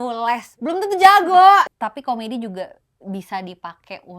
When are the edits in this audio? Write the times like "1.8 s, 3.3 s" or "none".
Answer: 1.7 s